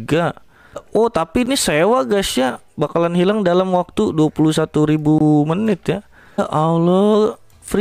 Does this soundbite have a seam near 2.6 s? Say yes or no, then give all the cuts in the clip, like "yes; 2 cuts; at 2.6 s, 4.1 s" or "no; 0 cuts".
no; 2 cuts; at 0.8 s, 6.4 s